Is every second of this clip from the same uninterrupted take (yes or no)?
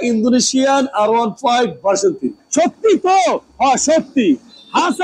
no